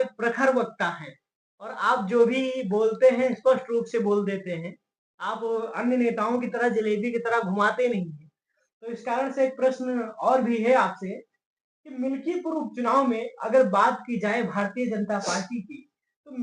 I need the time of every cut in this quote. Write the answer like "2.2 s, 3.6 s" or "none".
none